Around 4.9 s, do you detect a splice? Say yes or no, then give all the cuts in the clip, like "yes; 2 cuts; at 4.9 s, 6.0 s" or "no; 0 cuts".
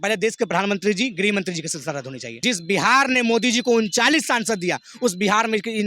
no; 1 cut; at 2.2 s